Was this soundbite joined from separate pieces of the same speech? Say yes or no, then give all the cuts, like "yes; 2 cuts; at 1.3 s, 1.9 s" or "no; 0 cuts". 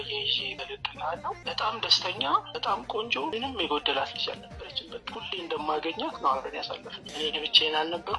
no; 0 cuts